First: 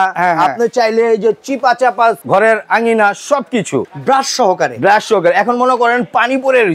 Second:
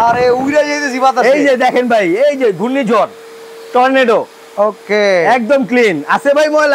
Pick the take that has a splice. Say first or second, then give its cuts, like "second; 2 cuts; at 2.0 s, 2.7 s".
first; 2 cuts; at 2.2 s, 3.8 s